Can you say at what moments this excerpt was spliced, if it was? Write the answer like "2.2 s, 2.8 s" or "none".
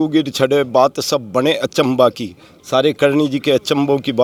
none